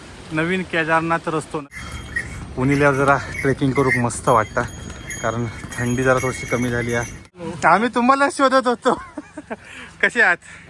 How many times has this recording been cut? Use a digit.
2